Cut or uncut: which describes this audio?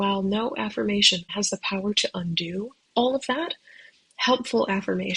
cut